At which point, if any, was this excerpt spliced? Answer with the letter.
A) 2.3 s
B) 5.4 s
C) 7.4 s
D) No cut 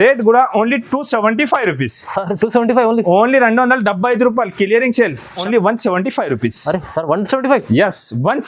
B